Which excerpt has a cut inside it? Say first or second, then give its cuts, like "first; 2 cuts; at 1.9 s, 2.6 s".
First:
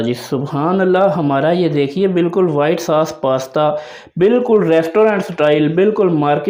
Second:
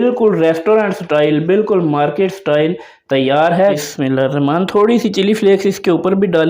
second; 1 cut; at 3.8 s